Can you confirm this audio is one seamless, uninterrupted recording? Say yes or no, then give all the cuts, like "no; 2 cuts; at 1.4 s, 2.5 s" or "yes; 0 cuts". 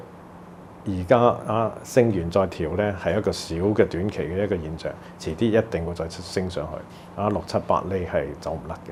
yes; 0 cuts